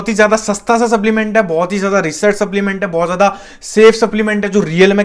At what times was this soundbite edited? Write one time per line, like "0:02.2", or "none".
none